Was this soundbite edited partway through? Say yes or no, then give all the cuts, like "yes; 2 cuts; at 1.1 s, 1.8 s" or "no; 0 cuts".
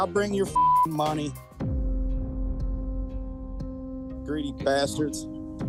no; 0 cuts